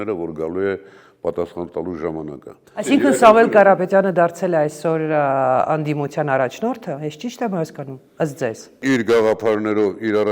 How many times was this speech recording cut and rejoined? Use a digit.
1